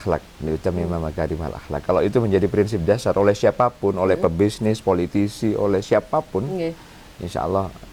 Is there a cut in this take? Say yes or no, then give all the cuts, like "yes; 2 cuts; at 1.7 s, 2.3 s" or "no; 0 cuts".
no; 0 cuts